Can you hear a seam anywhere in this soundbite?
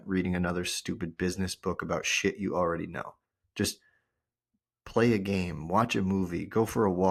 no; 0 cuts

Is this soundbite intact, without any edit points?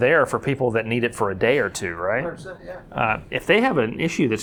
yes; 0 cuts

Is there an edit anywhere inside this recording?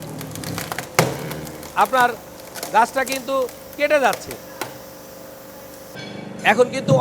yes; 1 cut; at 5.9 s

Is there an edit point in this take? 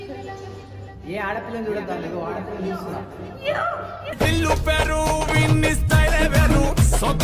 no; 0 cuts

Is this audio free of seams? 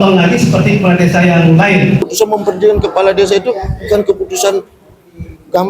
no; 1 cut; at 2.0 s

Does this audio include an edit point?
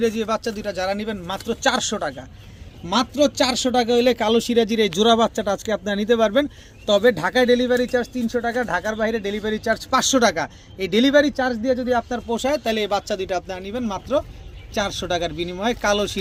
no; 0 cuts

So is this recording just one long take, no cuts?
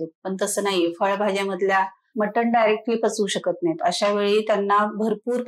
no; 1 cut; at 2.0 s

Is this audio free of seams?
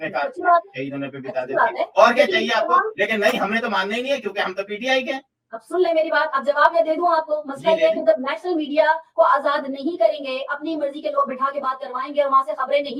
yes; 0 cuts

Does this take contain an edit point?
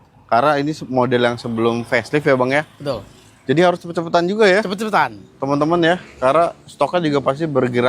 no; 0 cuts

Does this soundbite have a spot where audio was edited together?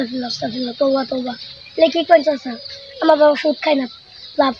no; 0 cuts

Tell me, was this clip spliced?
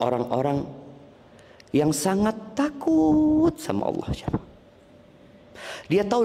no; 0 cuts

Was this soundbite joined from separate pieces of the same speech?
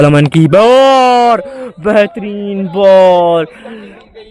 no; 0 cuts

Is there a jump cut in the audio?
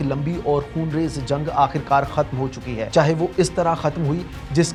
no; 0 cuts

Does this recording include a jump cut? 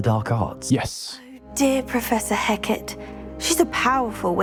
no; 0 cuts

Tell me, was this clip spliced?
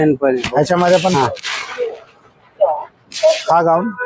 yes; 1 cut; at 1.1 s

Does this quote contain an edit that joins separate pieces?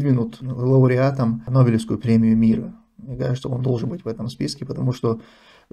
yes; 1 cut; at 1.4 s

